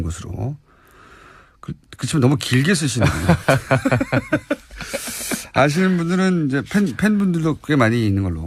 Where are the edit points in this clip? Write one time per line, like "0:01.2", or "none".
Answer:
none